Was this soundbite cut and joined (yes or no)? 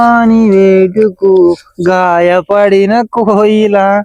no